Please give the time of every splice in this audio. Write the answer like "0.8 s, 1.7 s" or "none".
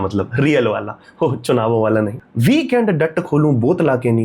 2.2 s